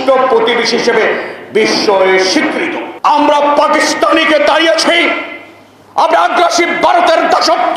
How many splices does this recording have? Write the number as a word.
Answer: one